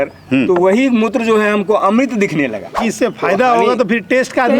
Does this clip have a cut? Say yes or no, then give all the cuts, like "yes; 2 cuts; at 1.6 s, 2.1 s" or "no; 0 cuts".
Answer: yes; 1 cut; at 2.8 s